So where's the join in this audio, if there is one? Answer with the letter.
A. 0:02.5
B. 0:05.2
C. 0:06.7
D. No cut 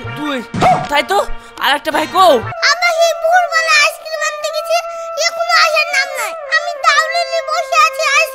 A